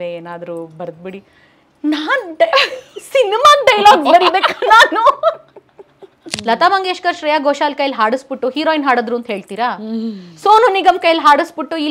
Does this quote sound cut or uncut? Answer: cut